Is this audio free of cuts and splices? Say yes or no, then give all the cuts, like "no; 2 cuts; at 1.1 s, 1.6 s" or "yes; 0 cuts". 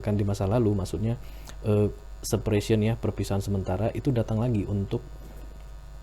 yes; 0 cuts